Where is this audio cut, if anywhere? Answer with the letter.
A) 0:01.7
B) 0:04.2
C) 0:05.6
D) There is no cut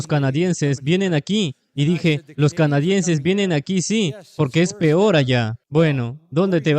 C